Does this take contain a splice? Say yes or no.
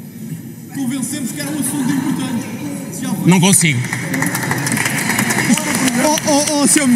yes